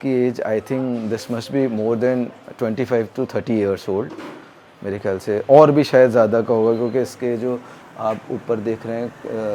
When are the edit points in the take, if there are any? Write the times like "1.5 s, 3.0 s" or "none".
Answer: none